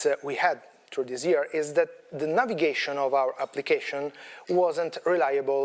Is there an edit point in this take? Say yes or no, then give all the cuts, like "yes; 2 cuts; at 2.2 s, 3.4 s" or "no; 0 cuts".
no; 0 cuts